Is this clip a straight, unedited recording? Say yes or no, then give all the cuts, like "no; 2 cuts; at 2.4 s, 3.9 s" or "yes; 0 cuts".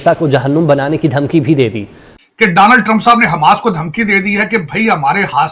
no; 1 cut; at 2.0 s